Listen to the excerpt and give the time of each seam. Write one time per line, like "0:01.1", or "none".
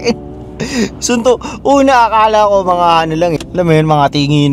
0:03.4